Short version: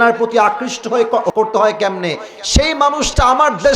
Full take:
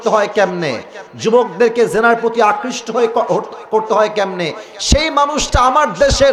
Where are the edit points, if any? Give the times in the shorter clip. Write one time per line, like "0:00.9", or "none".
0:01.3

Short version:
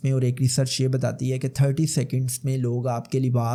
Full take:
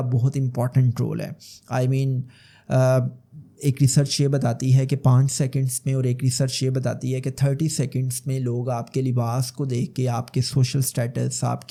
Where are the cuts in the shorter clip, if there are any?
none

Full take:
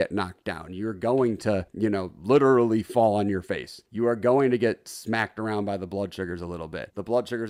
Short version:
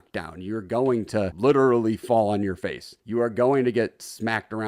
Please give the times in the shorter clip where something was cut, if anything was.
0:01.3

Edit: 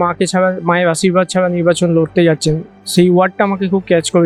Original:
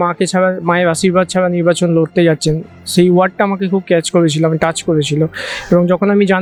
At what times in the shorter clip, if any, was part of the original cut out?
none

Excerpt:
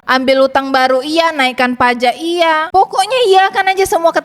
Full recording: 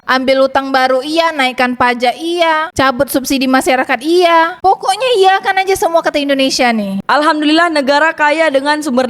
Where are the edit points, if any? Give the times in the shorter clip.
0:02.7

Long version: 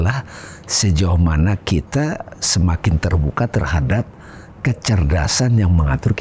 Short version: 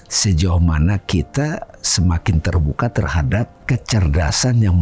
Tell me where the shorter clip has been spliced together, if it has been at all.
0:03.6

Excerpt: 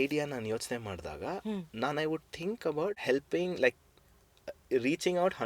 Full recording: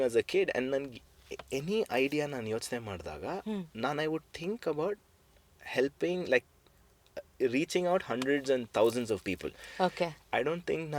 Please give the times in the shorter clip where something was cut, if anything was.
0:03.0

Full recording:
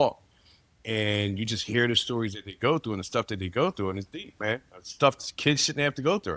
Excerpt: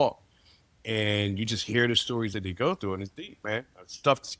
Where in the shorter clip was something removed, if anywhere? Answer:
0:02.4

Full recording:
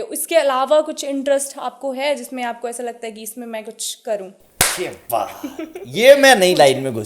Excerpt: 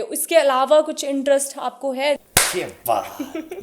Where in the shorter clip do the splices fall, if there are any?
0:02.2

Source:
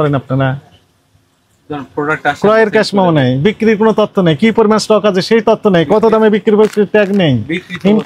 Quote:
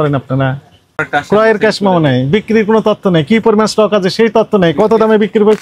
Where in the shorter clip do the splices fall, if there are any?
0:01.0

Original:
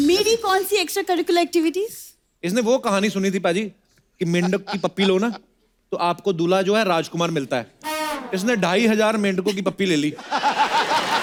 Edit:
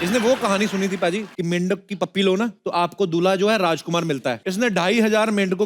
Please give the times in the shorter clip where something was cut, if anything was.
0:01.3
0:02.6
0:04.4

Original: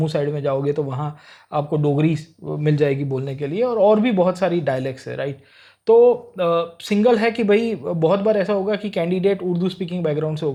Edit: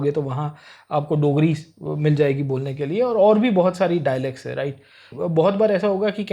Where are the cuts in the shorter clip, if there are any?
0:05.1

